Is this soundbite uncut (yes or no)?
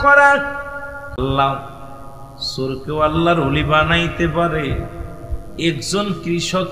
no